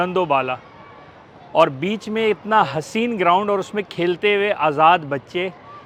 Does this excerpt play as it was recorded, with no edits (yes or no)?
yes